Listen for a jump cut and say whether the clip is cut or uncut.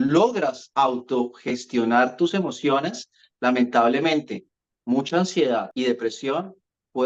uncut